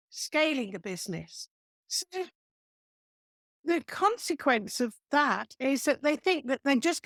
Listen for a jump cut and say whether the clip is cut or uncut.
uncut